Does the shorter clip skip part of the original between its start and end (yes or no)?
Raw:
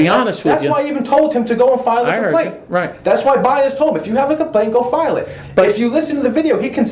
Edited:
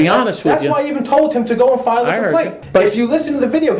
yes